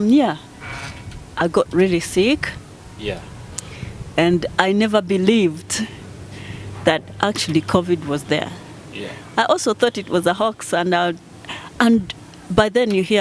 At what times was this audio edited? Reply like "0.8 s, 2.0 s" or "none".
none